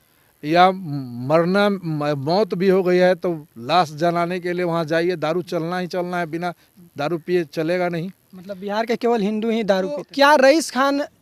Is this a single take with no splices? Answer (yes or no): no